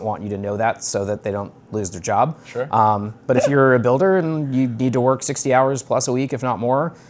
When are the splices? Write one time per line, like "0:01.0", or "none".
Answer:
none